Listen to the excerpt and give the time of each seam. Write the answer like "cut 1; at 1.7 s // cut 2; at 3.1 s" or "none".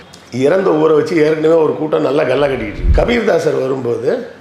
cut 1; at 2.8 s